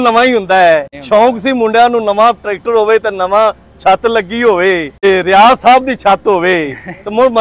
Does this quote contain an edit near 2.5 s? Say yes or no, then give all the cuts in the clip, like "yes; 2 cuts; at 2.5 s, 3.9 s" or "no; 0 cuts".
no; 2 cuts; at 0.9 s, 5.0 s